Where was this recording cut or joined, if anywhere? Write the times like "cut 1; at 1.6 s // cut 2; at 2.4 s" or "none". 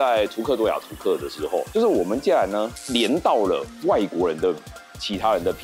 none